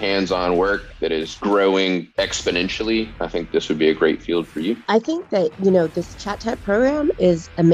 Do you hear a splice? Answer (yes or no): yes